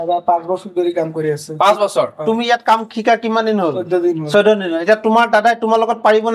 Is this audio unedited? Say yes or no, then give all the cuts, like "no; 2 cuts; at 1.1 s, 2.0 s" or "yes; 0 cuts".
yes; 0 cuts